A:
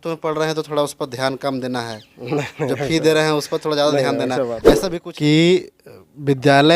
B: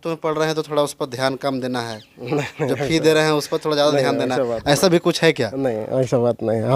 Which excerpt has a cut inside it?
A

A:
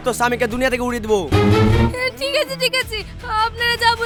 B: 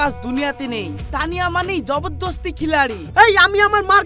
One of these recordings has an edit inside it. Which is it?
B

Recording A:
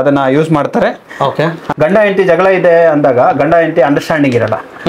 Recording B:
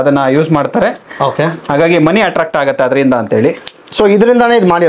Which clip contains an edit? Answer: A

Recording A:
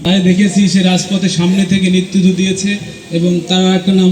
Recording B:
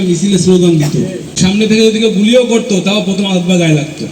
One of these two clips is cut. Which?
B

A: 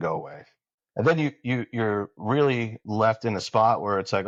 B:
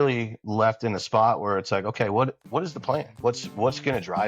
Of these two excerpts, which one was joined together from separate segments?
B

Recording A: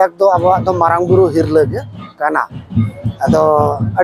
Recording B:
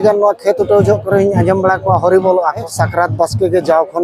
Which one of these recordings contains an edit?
B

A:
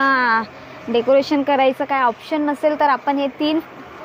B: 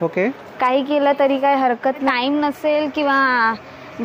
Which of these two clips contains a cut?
B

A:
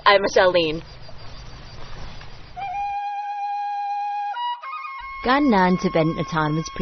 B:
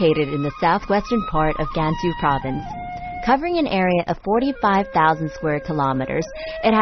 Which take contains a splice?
A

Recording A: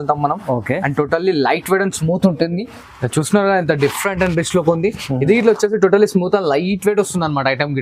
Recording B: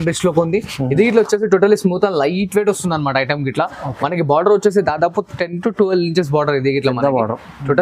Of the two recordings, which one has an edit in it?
A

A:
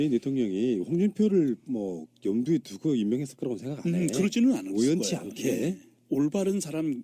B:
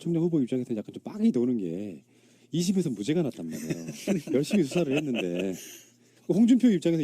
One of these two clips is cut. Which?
B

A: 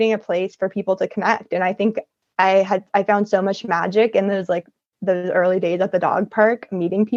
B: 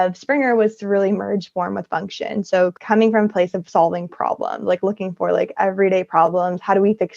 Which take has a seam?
B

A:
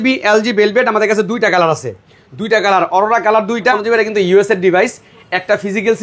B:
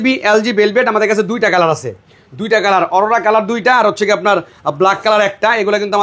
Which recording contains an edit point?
A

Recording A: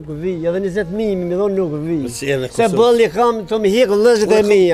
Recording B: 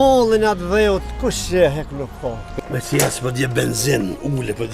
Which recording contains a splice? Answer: B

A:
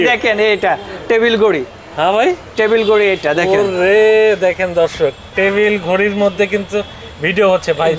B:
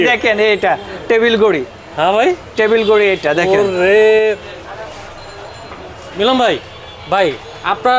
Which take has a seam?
B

